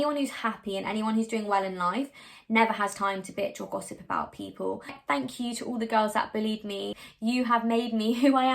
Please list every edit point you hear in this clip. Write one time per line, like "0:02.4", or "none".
0:05.0
0:07.0